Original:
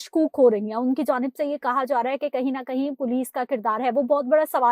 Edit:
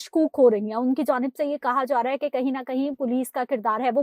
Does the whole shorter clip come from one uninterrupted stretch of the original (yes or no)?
yes